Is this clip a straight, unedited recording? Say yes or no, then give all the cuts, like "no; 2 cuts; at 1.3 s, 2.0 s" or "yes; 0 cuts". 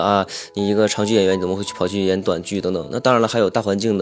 yes; 0 cuts